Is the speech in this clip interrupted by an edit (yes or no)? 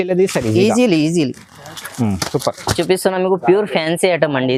no